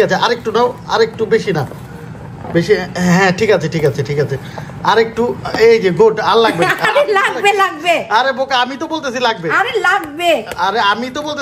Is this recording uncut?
yes; 0 cuts

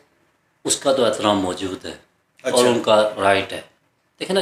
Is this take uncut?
yes; 0 cuts

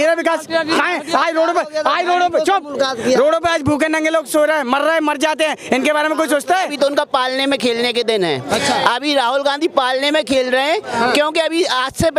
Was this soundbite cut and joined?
yes; 1 cut; at 6.7 s

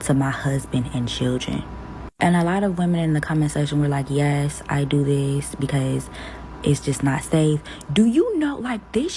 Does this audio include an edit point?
no; 0 cuts

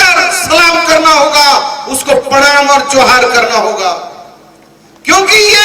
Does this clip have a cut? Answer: no; 0 cuts

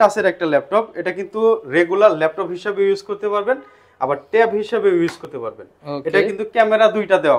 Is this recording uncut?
yes; 0 cuts

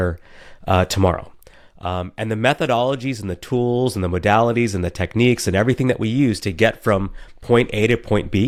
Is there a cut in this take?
no; 0 cuts

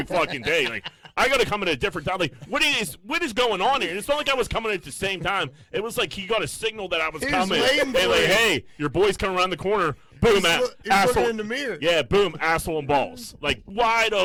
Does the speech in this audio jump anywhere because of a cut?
no; 0 cuts

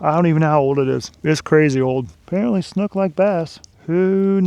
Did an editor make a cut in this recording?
yes; 1 cut; at 2.2 s

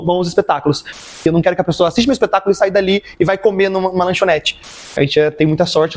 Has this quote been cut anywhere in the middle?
yes; 2 cuts; at 1.0 s, 4.8 s

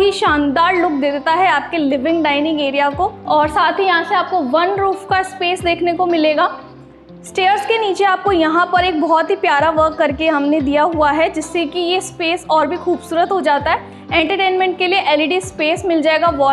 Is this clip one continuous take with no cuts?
yes; 0 cuts

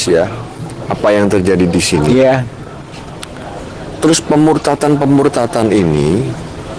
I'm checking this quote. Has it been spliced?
no; 0 cuts

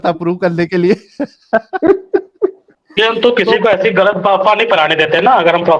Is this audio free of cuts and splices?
yes; 0 cuts

